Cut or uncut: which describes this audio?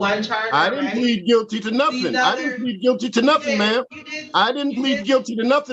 uncut